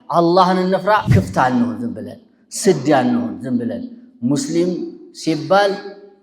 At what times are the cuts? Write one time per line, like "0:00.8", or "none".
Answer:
0:01.1